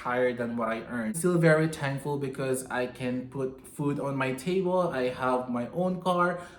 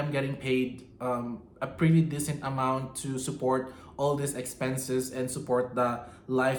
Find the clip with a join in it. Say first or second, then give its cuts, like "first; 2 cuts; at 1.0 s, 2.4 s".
first; 1 cut; at 1.2 s